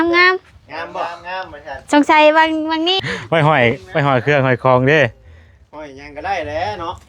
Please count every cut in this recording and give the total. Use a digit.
1